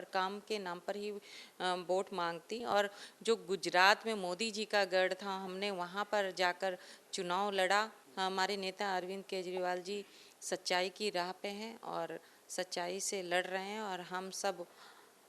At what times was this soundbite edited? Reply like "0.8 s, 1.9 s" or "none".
2.6 s, 8.0 s